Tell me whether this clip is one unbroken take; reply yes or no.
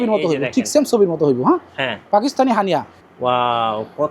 no